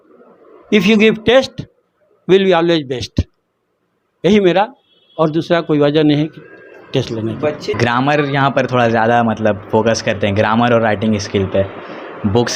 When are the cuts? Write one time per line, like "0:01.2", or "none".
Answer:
0:07.7

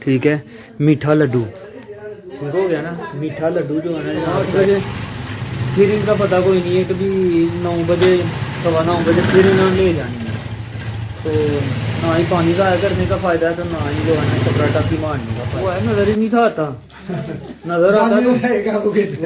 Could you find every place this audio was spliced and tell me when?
0:04.3
0:15.7

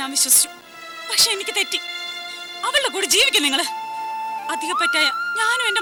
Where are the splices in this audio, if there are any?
none

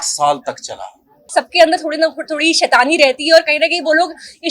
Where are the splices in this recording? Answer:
0:01.3

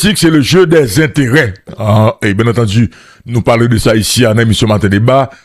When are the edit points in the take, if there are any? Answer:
0:01.7

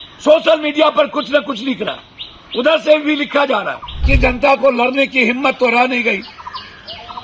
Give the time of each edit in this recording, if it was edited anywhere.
0:04.1

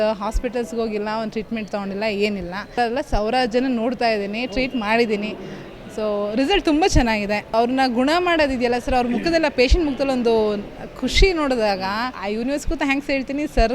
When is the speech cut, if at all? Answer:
0:02.8
0:07.5
0:12.2

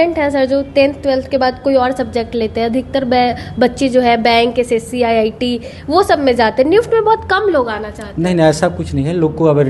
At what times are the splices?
none

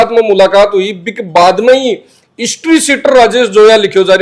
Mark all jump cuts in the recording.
none

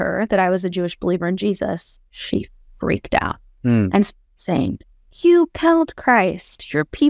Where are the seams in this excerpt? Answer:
none

